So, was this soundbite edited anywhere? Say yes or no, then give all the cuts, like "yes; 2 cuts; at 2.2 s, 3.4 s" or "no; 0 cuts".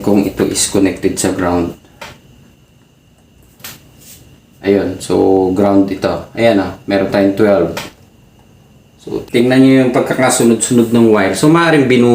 yes; 1 cut; at 9.3 s